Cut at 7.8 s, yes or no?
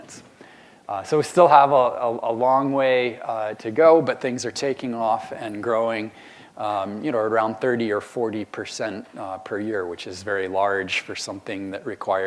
yes